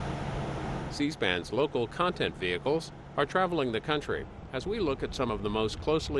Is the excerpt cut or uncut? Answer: cut